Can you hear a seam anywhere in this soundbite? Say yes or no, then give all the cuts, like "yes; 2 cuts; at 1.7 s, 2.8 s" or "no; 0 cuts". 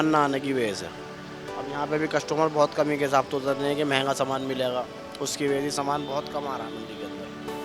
no; 0 cuts